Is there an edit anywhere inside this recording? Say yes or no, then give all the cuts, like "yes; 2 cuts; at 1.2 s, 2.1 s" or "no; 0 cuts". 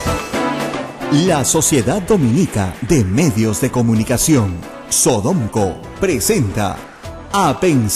yes; 1 cut; at 0.9 s